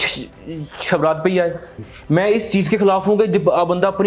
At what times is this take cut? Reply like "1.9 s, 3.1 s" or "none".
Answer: 1.8 s

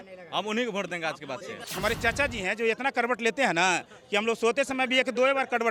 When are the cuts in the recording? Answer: 1.6 s

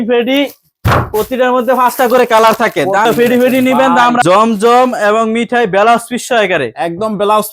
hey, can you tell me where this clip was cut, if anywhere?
3.0 s, 4.2 s

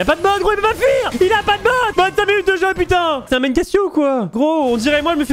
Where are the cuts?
1.1 s, 3.2 s, 4.3 s

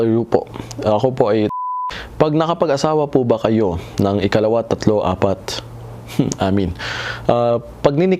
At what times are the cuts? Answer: 1.5 s

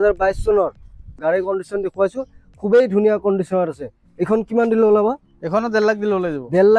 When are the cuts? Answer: 1.1 s

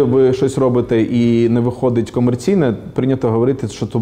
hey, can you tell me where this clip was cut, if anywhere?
none

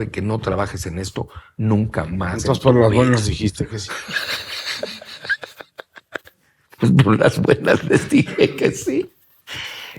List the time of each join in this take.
none

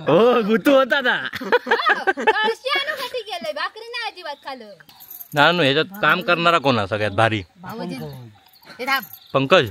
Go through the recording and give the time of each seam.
4.8 s

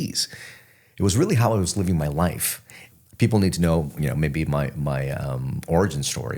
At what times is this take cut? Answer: 2.9 s

